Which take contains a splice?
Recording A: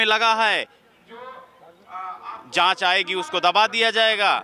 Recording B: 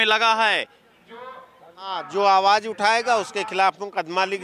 B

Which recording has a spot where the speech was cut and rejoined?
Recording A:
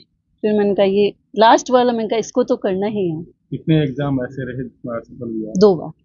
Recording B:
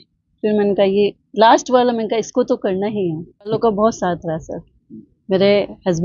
B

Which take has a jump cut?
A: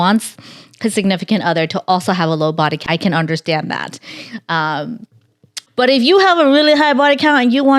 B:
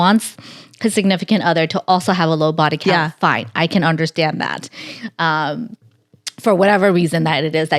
A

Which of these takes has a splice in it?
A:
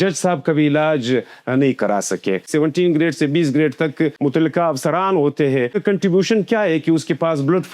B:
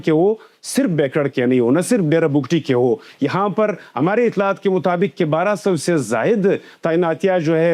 A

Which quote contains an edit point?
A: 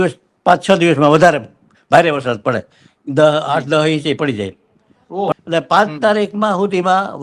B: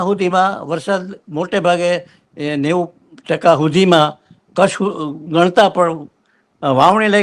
A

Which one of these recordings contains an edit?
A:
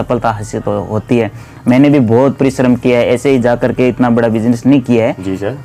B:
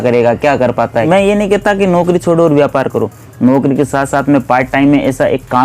B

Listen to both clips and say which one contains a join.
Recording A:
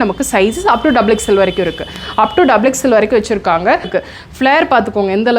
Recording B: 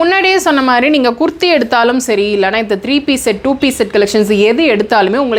A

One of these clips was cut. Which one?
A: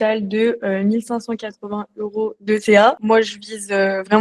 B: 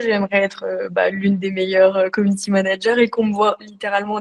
A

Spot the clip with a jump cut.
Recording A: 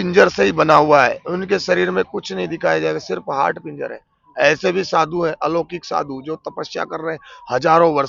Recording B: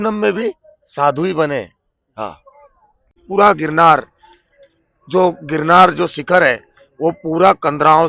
B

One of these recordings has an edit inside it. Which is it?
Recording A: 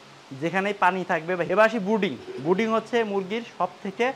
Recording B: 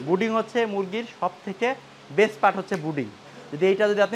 A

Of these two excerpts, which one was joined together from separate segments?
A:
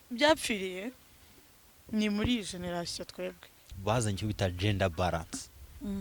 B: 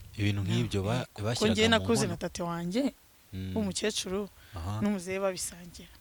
A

